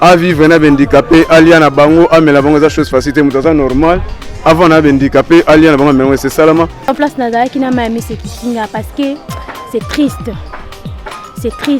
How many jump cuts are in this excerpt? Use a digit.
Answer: 1